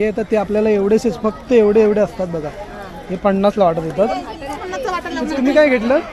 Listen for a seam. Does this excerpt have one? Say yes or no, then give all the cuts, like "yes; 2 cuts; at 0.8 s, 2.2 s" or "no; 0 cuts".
yes; 1 cut; at 4.5 s